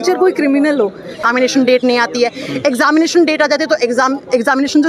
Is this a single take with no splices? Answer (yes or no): no